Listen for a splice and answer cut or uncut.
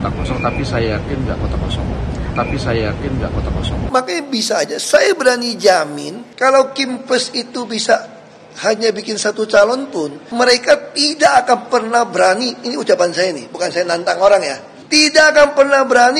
cut